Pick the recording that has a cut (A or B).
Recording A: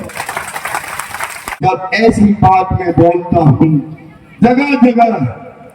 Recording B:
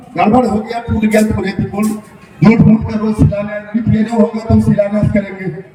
A